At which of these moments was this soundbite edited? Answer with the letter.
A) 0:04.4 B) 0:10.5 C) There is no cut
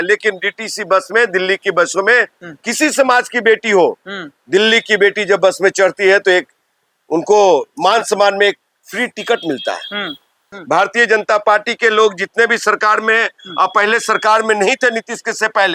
B